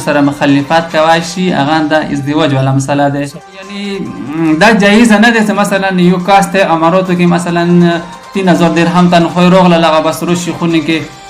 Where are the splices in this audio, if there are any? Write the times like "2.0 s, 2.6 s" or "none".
3.6 s